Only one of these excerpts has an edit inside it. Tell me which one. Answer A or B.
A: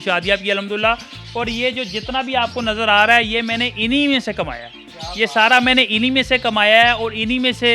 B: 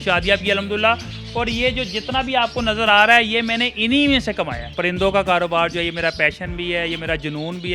B